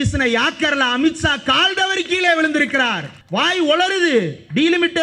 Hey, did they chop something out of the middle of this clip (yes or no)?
yes